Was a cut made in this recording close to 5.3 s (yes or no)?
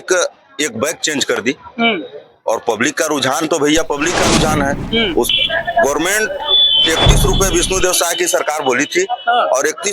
yes